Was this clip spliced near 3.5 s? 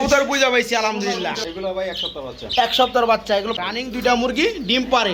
yes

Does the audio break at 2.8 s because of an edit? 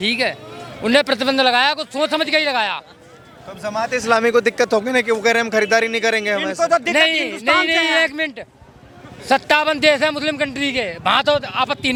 no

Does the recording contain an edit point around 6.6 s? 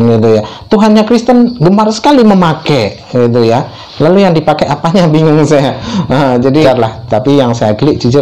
yes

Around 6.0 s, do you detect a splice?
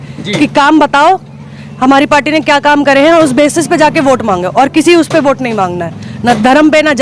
no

